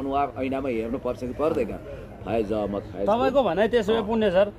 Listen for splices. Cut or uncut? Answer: uncut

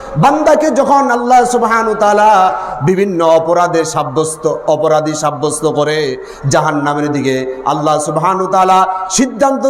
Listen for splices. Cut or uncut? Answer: uncut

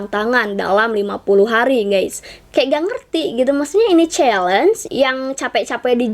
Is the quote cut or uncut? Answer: cut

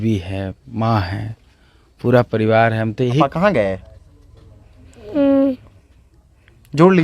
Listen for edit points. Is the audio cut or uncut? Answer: cut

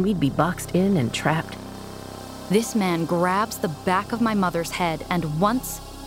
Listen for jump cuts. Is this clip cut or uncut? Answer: cut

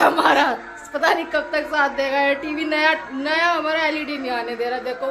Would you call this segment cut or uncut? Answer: uncut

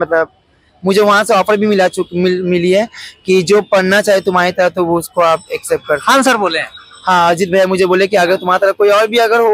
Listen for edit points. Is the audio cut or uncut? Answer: uncut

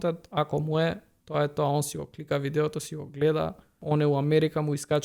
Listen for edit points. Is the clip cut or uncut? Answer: cut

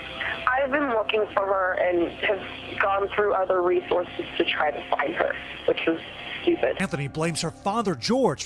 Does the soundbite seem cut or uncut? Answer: cut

